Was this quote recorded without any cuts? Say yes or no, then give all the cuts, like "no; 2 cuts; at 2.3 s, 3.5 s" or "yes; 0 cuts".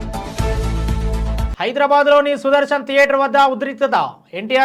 yes; 0 cuts